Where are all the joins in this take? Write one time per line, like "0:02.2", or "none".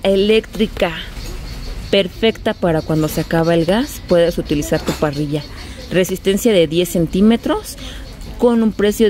none